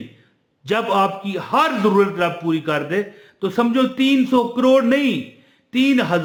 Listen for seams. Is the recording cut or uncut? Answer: uncut